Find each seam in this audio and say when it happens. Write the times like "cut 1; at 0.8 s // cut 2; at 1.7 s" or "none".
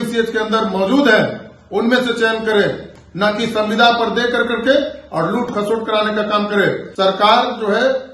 cut 1; at 6.9 s